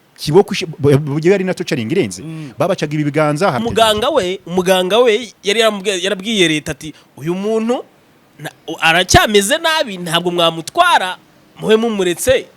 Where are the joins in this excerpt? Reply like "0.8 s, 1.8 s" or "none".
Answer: 3.6 s